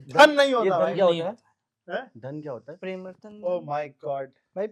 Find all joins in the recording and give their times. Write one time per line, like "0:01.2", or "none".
none